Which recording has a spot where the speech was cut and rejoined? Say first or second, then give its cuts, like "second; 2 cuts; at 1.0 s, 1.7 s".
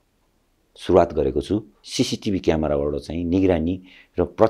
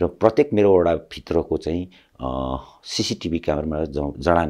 first; 1 cut; at 1.8 s